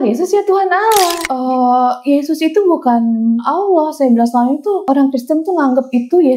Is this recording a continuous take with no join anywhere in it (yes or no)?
no